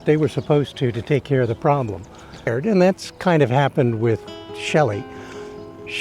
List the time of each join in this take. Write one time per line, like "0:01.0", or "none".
0:02.5